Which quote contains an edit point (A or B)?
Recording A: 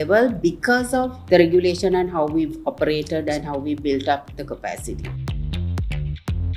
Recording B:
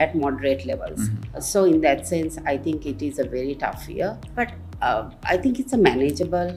A